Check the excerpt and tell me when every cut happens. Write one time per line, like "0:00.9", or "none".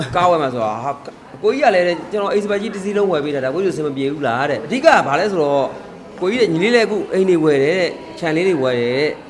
0:04.7